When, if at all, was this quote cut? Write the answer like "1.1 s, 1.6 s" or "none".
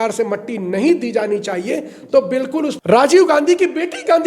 2.8 s